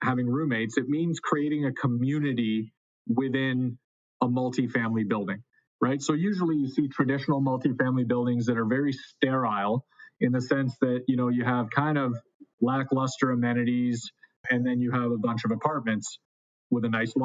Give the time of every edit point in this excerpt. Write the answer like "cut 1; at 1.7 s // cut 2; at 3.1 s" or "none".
cut 1; at 14.4 s